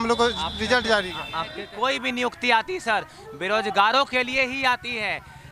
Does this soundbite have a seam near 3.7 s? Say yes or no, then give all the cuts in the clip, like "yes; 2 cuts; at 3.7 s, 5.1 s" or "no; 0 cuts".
no; 1 cut; at 1.6 s